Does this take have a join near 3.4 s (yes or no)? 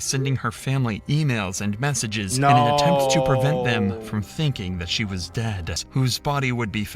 no